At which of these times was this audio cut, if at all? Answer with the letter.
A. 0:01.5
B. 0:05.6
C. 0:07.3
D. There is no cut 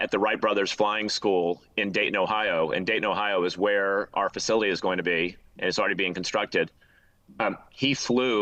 D